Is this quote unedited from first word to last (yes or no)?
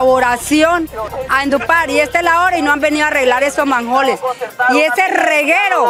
no